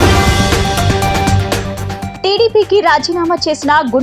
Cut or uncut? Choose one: cut